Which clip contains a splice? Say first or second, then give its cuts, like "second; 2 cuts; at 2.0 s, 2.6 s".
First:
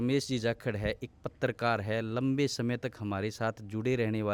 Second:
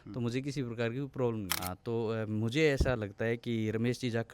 second; 1 cut; at 1.5 s